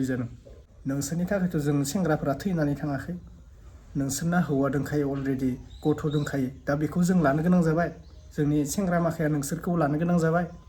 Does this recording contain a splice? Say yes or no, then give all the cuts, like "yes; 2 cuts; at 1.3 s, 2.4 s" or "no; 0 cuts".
yes; 1 cut; at 0.9 s